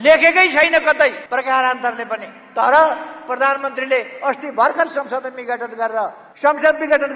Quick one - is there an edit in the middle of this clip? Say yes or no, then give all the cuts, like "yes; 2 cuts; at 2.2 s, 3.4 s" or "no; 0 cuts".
no; 0 cuts